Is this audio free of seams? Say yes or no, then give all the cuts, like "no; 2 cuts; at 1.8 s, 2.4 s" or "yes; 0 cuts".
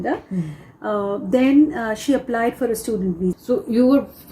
no; 1 cut; at 3.4 s